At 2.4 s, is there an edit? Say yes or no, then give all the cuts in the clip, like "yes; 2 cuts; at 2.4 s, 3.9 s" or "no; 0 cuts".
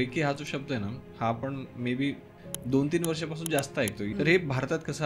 yes; 2 cuts; at 2.4 s, 4.0 s